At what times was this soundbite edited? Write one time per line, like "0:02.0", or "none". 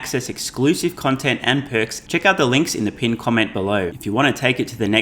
0:02.0
0:03.9